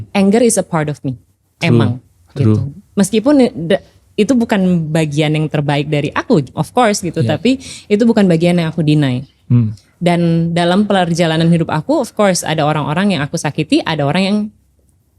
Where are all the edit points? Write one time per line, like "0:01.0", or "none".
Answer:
none